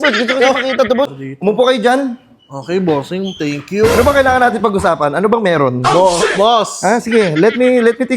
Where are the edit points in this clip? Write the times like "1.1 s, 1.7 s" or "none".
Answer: 1.1 s